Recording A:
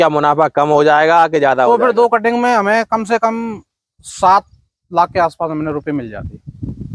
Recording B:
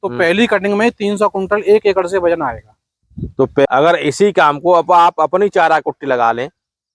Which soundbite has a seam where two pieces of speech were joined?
B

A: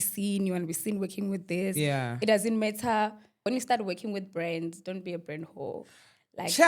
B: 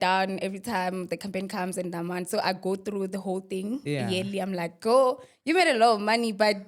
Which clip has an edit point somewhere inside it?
A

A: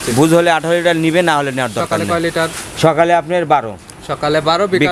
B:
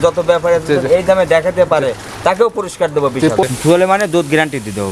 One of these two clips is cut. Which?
B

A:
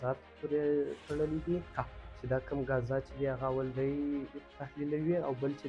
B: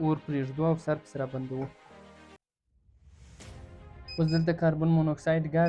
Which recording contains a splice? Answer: B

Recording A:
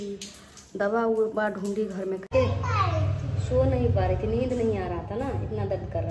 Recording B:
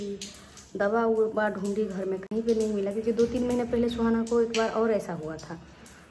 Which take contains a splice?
A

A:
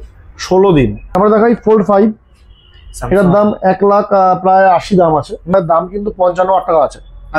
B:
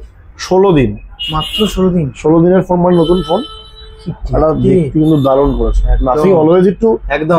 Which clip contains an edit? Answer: A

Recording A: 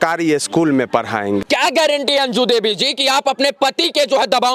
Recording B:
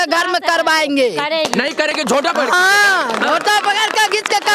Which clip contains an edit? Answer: A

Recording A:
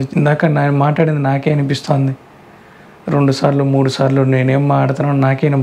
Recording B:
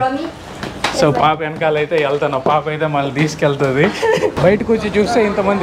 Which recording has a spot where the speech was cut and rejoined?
B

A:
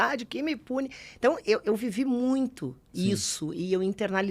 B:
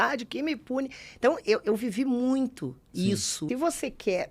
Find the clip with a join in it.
B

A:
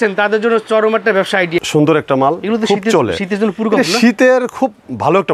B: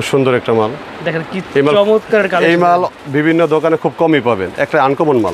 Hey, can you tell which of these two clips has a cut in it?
A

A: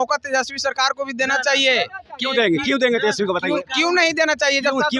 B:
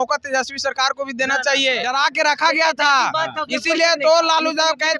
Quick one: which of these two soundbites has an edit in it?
B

